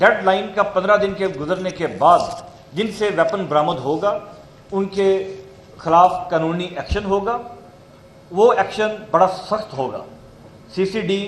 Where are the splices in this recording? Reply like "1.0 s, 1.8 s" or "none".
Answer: none